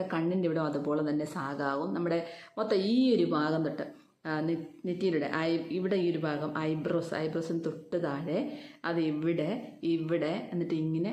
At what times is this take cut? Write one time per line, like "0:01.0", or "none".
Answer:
none

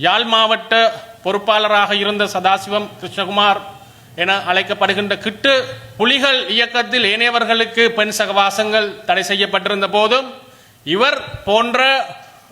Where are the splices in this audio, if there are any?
0:05.9

